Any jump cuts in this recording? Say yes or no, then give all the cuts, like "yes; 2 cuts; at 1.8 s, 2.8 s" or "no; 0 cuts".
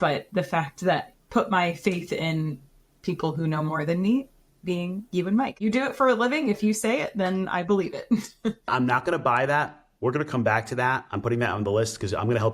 yes; 3 cuts; at 1.1 s, 5.6 s, 8.6 s